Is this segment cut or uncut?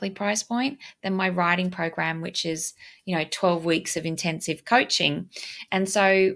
uncut